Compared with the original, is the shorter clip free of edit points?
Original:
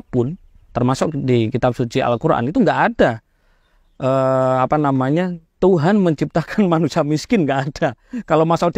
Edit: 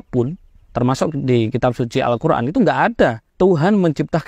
no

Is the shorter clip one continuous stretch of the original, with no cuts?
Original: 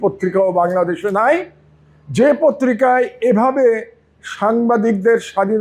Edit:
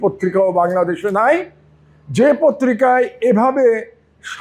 yes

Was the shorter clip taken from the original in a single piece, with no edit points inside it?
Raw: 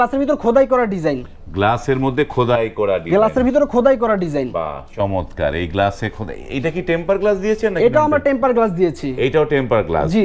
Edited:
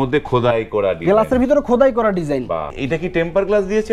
no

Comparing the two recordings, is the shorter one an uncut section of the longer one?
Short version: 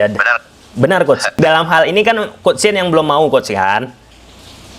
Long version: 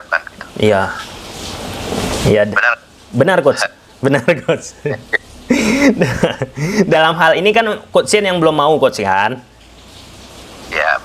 no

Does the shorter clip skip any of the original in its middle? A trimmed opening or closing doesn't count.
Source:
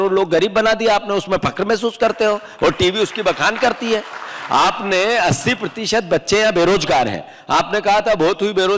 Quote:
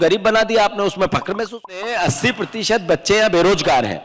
yes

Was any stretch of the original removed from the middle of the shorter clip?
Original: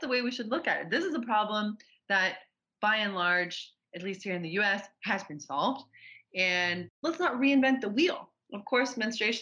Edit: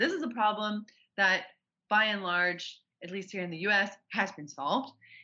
no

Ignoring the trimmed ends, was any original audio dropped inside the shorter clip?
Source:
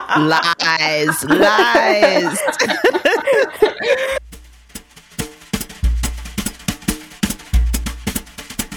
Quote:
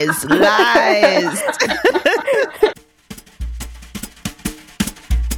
yes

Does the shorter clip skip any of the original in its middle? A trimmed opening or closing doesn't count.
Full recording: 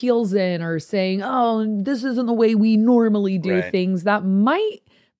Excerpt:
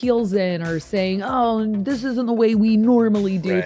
no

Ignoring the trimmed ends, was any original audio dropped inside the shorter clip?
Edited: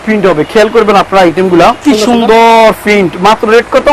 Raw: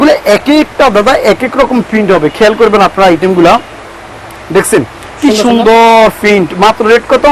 yes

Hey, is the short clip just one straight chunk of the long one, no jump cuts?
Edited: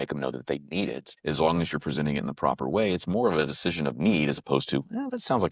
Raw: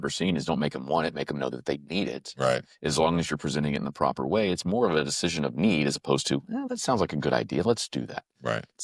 no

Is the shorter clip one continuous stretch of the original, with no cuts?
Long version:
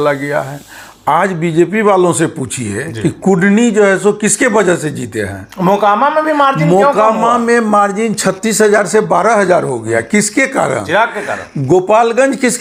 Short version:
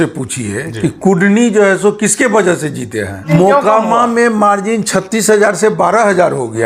no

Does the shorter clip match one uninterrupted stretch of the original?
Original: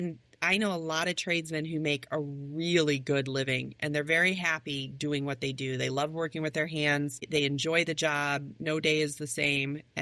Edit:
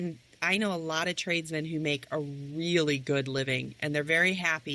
yes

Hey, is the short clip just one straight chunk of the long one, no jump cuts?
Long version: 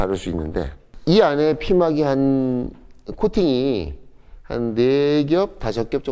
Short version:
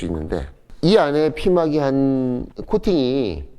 no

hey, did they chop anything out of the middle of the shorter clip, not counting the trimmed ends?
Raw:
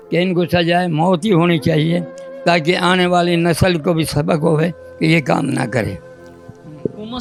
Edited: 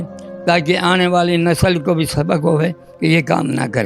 no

